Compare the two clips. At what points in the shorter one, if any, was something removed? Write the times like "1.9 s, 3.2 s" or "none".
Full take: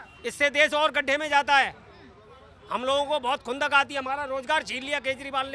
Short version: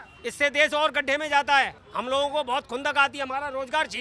1.8 s